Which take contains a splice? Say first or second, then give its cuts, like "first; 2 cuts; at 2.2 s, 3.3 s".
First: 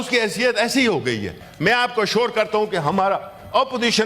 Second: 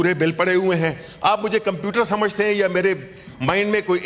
first; 1 cut; at 1.4 s